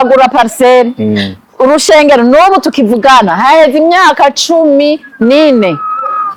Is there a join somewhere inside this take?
no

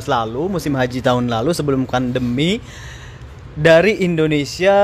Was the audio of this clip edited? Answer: no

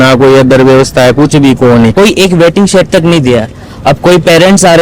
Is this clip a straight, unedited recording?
no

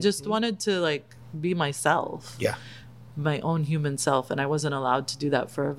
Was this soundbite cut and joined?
no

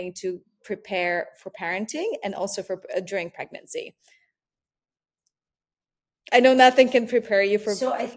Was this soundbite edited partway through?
no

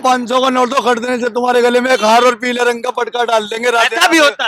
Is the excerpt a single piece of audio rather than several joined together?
yes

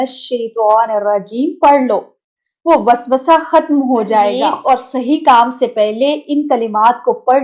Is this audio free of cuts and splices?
no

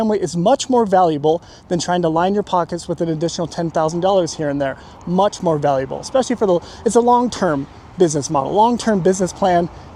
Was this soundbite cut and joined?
no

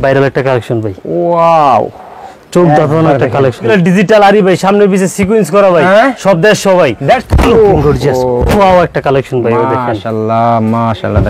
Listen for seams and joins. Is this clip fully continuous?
no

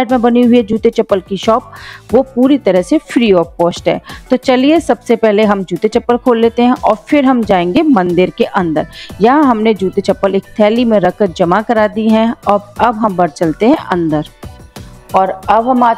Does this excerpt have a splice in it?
no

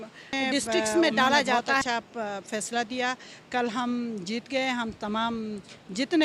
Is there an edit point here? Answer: yes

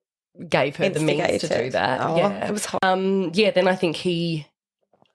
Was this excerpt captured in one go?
no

